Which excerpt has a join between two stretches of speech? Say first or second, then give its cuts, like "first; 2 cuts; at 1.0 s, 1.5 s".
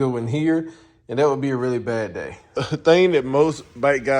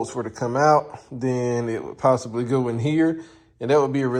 first; 1 cut; at 2.6 s